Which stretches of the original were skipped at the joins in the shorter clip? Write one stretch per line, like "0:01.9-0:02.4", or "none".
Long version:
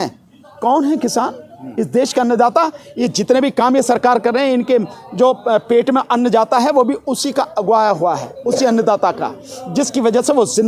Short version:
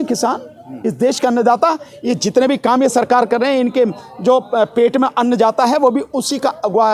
none